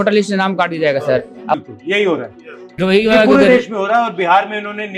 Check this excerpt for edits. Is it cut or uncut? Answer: cut